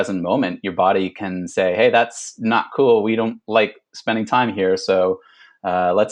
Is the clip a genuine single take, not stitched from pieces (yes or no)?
yes